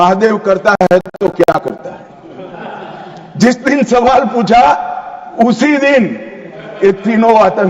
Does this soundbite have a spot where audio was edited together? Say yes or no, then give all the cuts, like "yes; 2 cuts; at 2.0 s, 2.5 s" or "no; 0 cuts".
no; 0 cuts